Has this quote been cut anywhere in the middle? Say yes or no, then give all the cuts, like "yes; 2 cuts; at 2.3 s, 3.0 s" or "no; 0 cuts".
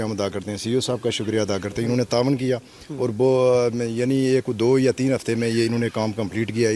no; 0 cuts